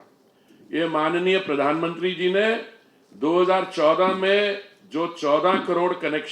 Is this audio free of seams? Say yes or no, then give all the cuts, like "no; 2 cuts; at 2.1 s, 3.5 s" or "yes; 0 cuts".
yes; 0 cuts